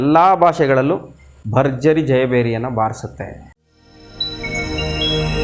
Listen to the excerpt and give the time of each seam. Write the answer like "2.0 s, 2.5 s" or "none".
none